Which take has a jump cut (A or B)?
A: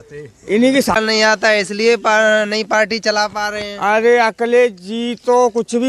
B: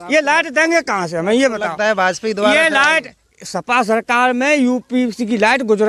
A